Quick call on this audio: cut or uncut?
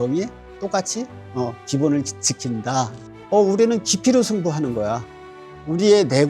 cut